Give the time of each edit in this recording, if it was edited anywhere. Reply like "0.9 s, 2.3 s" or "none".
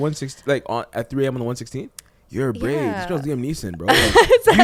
none